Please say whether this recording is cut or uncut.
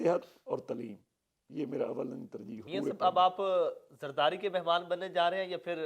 cut